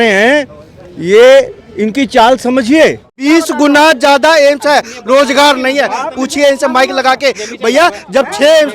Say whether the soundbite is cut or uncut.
cut